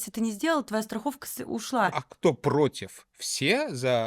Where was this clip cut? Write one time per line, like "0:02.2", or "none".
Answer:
0:02.0